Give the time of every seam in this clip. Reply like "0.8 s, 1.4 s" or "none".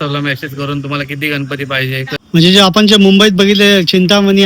2.2 s